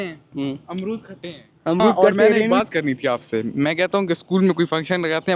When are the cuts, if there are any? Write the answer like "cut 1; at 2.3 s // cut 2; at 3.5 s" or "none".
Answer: cut 1; at 2.6 s